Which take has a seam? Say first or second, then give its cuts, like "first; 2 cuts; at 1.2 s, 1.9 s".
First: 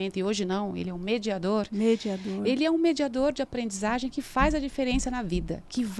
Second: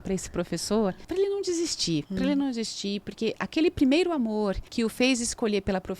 second; 3 cuts; at 1.0 s, 2.1 s, 4.6 s